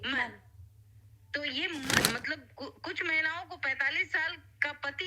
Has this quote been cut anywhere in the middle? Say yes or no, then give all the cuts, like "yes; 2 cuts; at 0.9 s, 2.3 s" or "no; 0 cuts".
yes; 1 cut; at 2.0 s